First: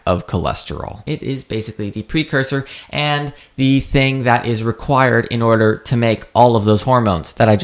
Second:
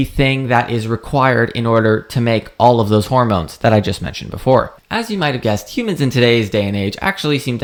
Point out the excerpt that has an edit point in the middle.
first; 1 cut; at 1.1 s

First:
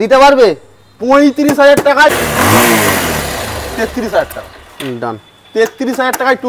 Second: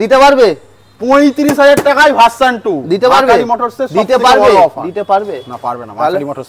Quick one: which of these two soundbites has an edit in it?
first; 1 cut; at 2.1 s

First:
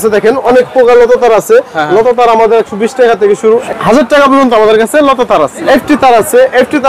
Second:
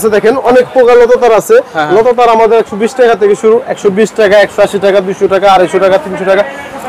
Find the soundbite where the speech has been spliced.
first; 2 cuts; at 3.7 s, 5.6 s

